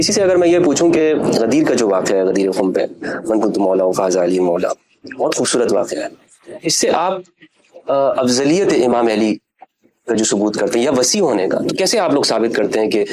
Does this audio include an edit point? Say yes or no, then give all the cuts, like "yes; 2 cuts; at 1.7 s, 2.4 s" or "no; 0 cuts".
no; 0 cuts